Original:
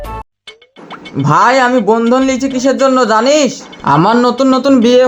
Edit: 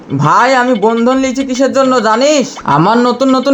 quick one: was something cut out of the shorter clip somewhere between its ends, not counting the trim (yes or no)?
yes